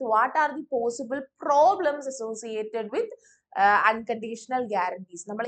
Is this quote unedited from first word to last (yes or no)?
yes